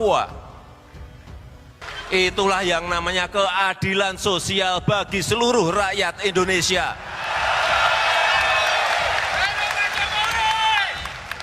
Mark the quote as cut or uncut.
cut